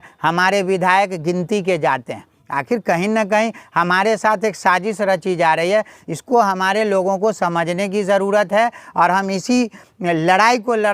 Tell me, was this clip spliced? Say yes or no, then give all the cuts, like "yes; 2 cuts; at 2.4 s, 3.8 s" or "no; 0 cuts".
no; 0 cuts